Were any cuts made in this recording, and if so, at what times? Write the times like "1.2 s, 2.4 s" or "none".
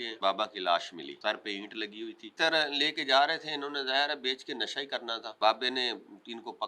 1.1 s, 2.3 s, 5.3 s